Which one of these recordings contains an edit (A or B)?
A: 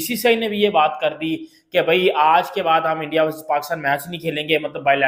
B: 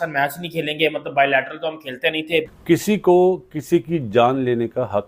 B